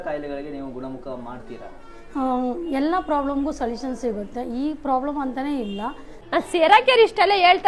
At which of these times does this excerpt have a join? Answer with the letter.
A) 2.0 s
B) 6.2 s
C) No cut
B